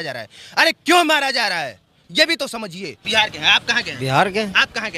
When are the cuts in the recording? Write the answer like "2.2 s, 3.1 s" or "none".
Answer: 3.0 s